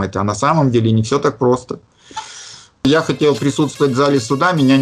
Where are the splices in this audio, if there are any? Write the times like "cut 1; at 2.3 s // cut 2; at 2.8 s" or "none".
cut 1; at 2.8 s